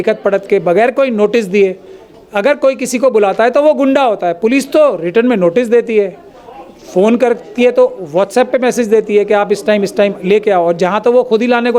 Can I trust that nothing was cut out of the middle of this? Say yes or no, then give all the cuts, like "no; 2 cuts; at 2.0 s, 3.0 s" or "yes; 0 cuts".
yes; 0 cuts